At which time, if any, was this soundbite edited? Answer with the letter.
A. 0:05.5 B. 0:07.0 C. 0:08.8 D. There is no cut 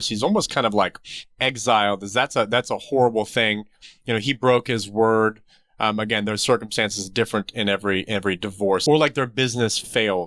C